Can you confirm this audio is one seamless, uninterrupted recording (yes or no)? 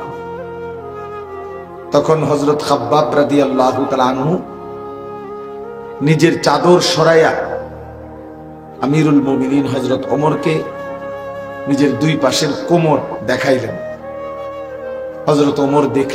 yes